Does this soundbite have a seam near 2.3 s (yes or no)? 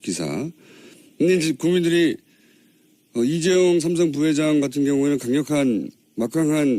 yes